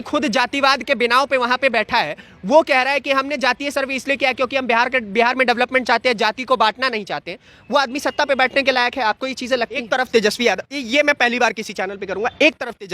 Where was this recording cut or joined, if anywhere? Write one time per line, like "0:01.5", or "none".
0:09.8